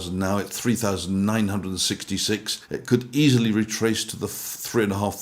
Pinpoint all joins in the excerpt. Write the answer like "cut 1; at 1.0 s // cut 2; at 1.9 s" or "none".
cut 1; at 2.5 s